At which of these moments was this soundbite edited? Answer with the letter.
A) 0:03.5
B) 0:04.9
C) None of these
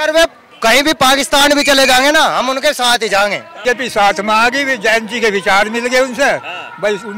A